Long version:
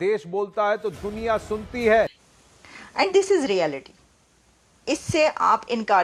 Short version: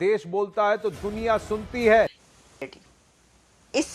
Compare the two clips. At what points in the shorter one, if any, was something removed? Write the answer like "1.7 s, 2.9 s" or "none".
2.8 s